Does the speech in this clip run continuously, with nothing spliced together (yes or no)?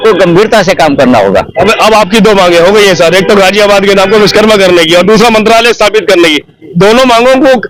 yes